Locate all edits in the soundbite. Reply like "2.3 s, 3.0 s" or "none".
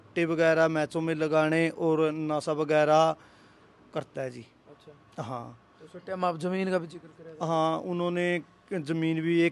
none